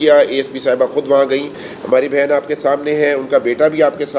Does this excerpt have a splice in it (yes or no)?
yes